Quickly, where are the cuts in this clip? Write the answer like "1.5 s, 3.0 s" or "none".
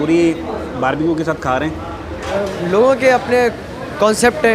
2.3 s